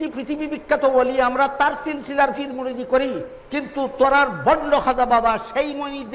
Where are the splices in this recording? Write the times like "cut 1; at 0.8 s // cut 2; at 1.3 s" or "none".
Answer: none